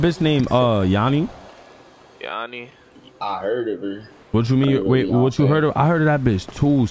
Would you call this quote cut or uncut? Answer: uncut